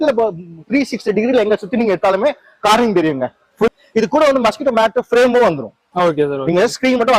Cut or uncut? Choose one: cut